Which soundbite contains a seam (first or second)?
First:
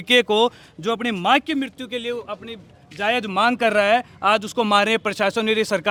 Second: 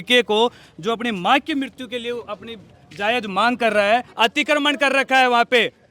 second